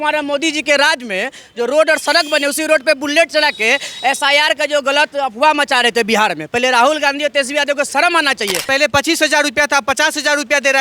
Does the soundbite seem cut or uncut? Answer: cut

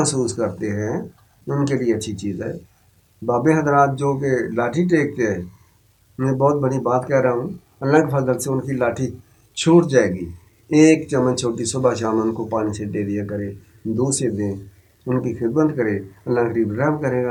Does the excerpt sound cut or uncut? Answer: uncut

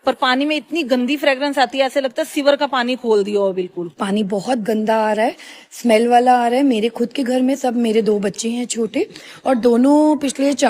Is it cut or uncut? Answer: uncut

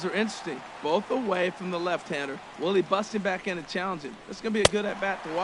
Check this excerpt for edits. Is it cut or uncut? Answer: uncut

